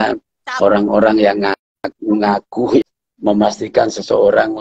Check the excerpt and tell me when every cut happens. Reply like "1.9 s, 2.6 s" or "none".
3.0 s